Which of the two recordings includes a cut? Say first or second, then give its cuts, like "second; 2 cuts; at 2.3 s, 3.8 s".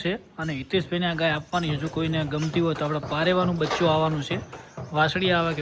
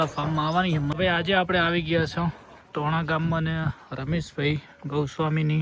second; 1 cut; at 0.9 s